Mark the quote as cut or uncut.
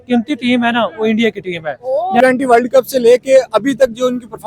cut